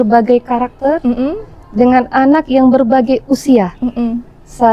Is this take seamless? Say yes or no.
yes